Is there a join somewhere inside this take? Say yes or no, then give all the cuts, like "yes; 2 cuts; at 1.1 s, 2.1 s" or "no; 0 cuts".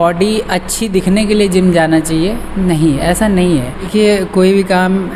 yes; 1 cut; at 3.9 s